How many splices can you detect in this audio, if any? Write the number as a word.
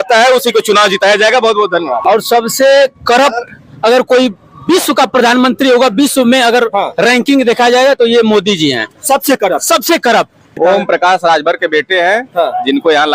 two